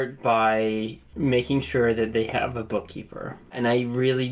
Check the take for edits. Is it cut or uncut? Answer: cut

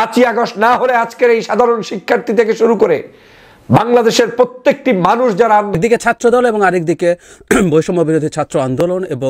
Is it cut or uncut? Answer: cut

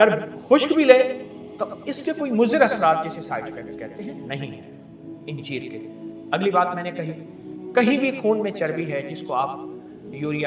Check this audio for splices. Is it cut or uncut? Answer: uncut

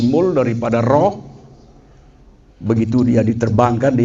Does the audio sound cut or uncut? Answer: uncut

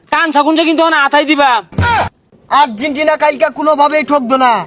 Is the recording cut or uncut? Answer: cut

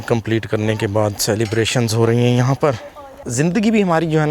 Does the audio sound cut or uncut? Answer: cut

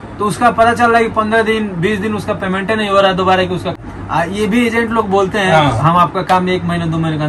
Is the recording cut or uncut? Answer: cut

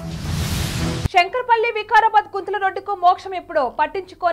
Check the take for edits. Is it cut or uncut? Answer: cut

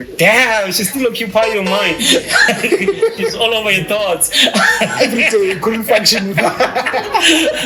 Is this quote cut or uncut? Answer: uncut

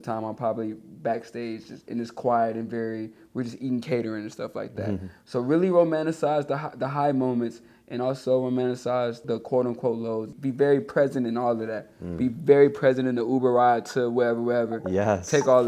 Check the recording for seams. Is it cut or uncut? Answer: cut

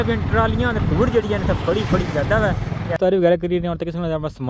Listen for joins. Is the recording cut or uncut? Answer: cut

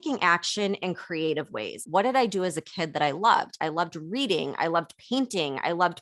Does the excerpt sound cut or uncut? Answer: cut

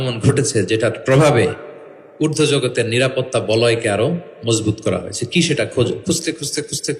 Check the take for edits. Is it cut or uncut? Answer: uncut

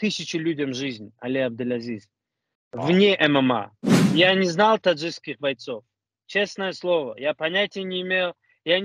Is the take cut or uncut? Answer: cut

